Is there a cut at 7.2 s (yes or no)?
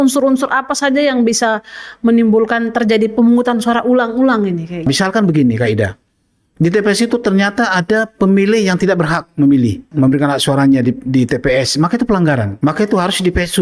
no